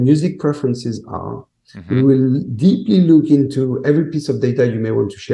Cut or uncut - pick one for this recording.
uncut